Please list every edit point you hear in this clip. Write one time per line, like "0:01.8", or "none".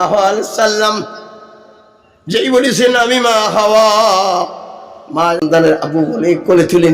0:05.4